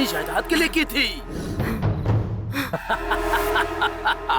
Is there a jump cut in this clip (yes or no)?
yes